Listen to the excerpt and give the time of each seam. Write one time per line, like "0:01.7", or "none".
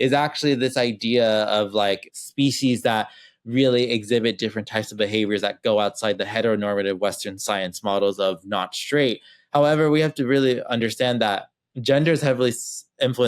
0:02.1

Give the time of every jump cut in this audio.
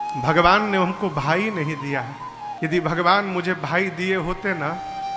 0:02.5

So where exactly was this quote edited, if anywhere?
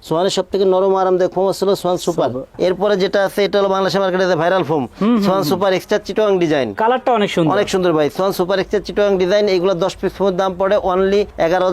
none

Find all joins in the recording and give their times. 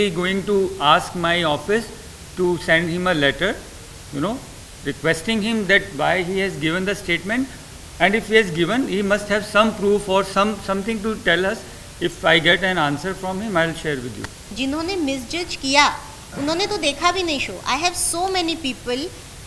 0:14.5

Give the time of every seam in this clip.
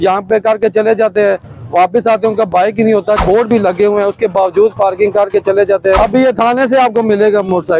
0:03.2
0:06.0

